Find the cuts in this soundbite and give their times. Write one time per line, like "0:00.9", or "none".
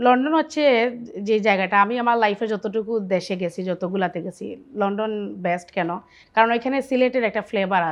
none